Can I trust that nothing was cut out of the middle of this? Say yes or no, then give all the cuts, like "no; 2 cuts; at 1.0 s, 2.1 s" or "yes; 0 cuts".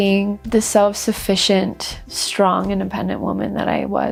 yes; 0 cuts